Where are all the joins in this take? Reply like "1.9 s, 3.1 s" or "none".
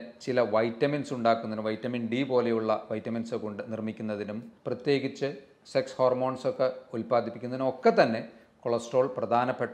4.5 s